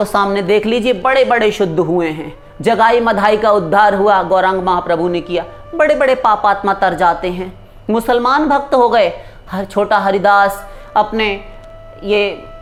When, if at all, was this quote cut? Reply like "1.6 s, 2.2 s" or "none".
none